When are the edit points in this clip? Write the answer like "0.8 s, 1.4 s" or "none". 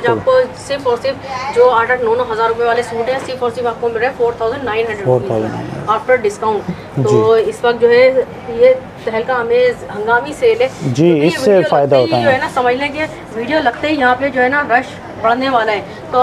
none